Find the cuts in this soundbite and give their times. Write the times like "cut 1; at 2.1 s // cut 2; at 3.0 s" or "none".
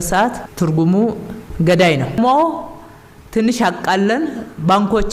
cut 1; at 2.2 s